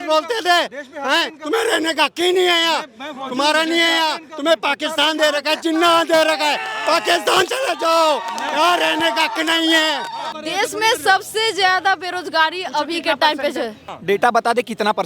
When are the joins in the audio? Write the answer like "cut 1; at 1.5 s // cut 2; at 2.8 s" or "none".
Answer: cut 1; at 10.2 s // cut 2; at 13.8 s